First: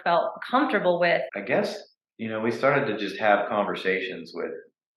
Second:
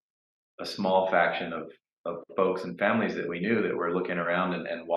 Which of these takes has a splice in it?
first; 1 cut; at 1.3 s

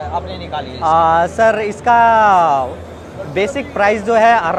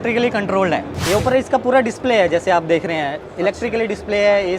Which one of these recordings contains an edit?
second; 1 cut; at 0.9 s

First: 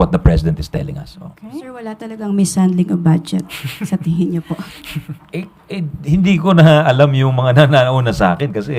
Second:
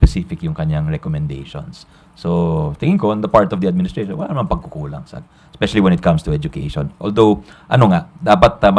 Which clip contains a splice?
first; 1 cut; at 1.4 s

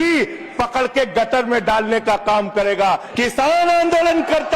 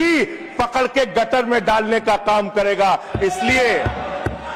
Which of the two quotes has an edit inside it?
first; 1 cut; at 3.1 s

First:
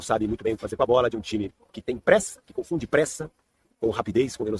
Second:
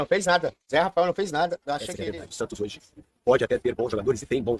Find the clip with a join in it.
second; 1 cut; at 1.9 s

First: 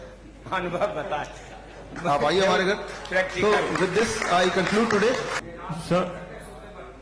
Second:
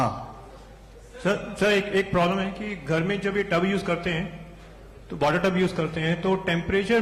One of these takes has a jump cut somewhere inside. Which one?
first; 1 cut; at 5.5 s

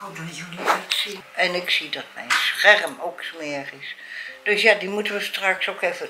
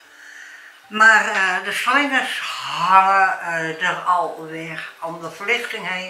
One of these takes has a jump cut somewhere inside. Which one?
first; 1 cut; at 1.2 s

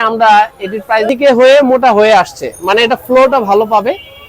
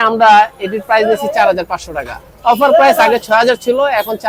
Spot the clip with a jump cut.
first; 1 cut; at 1.1 s

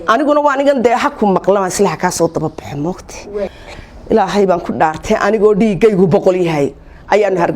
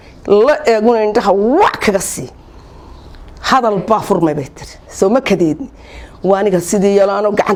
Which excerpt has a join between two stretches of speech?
first; 1 cut; at 3.6 s

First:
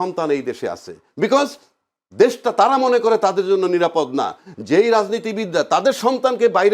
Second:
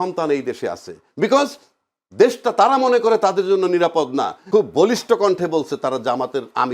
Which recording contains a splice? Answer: second; 1 cut; at 4.4 s

